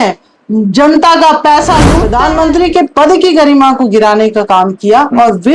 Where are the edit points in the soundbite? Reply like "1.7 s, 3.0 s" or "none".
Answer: 2.0 s